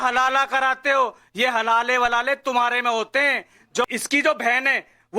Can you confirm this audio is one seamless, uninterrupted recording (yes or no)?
no